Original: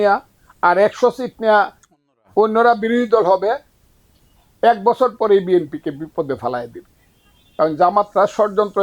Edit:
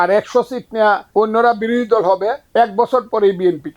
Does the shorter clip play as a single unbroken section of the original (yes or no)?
no